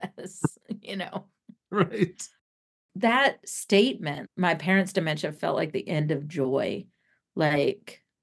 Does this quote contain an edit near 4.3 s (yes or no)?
no